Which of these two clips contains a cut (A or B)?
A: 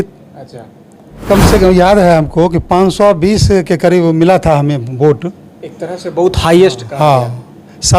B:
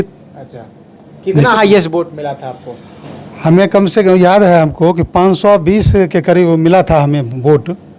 A